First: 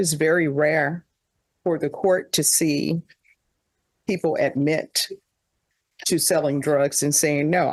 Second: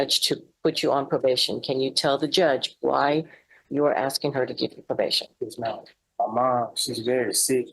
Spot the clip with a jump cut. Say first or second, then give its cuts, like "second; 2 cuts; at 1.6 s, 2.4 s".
second; 1 cut; at 6.0 s